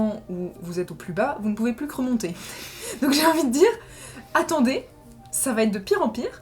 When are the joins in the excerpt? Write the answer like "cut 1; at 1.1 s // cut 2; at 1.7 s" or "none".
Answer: none